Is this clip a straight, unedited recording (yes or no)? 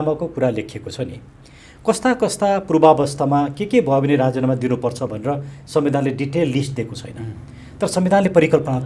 yes